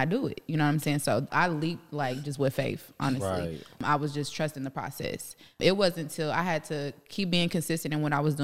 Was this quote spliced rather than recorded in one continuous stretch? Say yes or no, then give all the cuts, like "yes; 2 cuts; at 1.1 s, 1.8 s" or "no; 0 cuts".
yes; 3 cuts; at 1.3 s, 3.8 s, 5.6 s